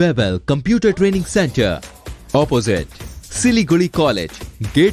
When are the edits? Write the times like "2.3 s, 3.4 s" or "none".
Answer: none